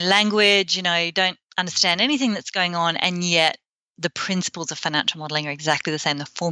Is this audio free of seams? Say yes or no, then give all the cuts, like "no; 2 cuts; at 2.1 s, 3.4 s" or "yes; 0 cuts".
yes; 0 cuts